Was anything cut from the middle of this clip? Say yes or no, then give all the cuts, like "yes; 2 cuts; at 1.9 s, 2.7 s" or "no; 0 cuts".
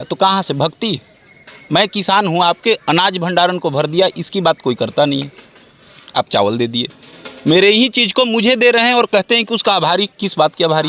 no; 0 cuts